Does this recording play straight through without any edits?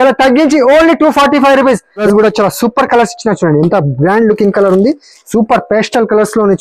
no; 1 cut; at 2.0 s

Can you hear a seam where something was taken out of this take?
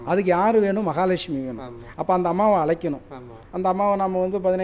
no; 0 cuts

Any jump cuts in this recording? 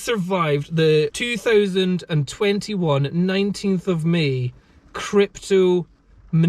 yes; 1 cut; at 1.2 s

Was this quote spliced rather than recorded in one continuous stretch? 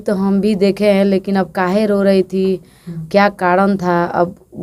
no; 0 cuts

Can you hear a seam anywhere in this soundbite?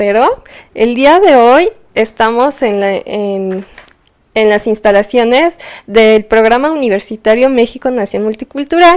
no; 0 cuts

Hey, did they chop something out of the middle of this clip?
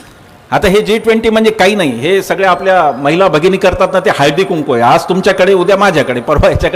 no; 0 cuts

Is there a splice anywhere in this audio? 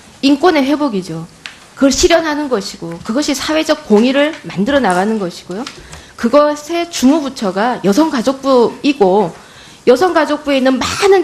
no; 0 cuts

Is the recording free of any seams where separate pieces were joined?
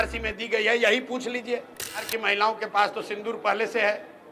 no; 1 cut; at 2.1 s

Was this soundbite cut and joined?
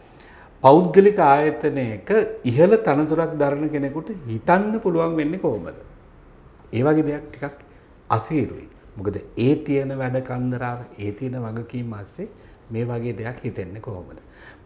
no; 0 cuts

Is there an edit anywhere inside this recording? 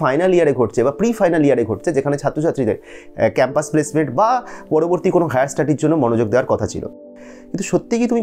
yes; 1 cut; at 7.1 s

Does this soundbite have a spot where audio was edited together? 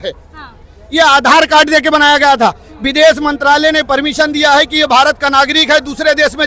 no; 0 cuts

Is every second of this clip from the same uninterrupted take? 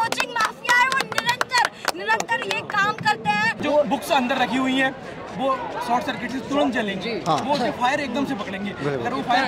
no; 1 cut; at 3.6 s

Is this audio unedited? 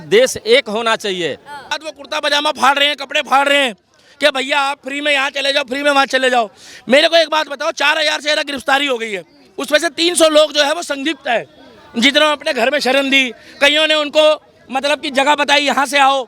no; 1 cut; at 1.6 s

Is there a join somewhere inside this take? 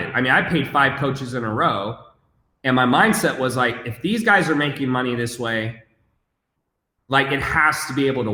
no; 0 cuts

